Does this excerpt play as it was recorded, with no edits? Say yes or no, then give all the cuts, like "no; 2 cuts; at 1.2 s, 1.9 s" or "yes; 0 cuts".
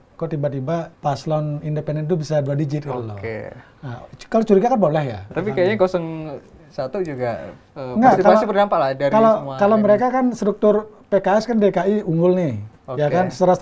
no; 2 cuts; at 0.9 s, 5.3 s